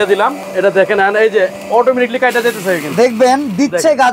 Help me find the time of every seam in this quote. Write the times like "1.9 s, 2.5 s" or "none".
none